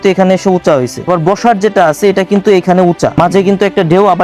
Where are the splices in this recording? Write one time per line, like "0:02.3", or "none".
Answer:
0:01.0
0:03.1